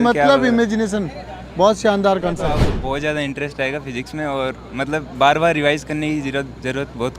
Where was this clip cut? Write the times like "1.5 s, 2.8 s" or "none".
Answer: 2.7 s